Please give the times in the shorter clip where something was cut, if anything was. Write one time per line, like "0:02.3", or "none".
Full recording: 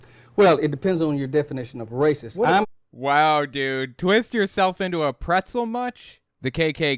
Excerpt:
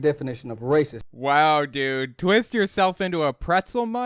0:01.0